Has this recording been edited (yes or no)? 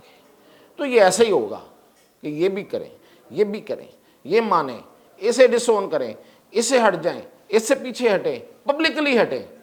no